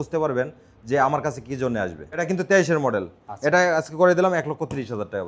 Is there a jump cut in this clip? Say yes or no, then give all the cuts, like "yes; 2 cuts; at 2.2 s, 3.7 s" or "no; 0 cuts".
yes; 1 cut; at 2.2 s